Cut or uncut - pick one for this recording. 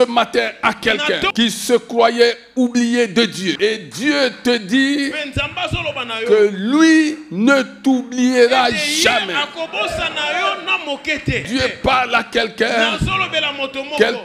cut